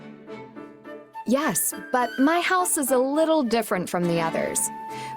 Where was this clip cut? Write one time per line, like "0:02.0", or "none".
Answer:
0:01.0